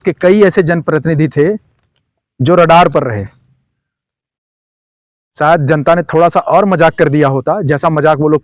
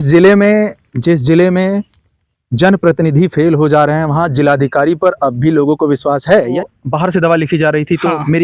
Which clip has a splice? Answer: second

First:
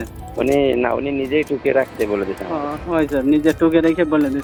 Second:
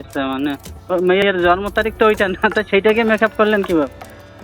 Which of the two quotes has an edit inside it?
second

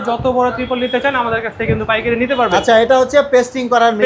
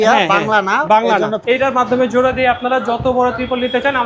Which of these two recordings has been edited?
second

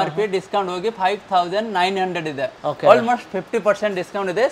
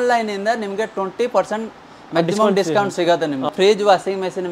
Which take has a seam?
second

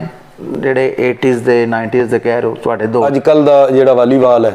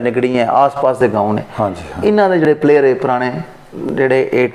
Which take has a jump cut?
first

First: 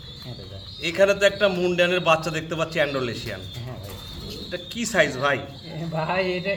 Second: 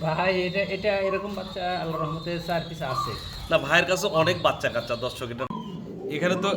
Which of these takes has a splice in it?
second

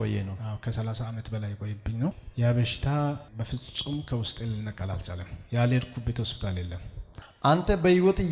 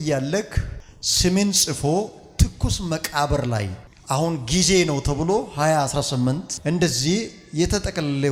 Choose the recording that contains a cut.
first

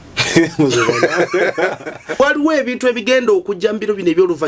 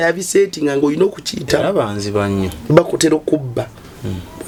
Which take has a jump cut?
first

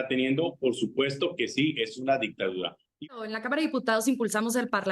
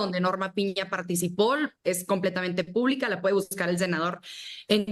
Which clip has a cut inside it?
first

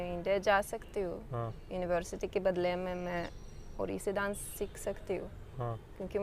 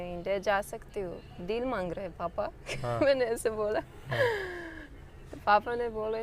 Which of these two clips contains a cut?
second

